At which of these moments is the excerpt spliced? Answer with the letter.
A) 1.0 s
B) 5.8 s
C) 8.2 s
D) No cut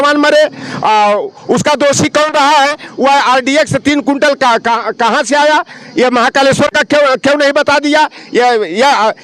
D